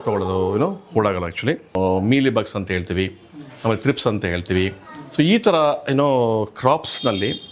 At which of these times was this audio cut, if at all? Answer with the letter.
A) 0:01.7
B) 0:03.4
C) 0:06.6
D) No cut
A